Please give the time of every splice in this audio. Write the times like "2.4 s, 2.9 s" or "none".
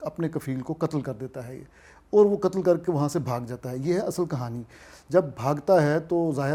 none